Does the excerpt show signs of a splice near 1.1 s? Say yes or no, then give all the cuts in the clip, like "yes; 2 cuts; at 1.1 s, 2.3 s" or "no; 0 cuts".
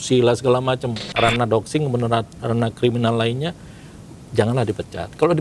yes; 1 cut; at 1.1 s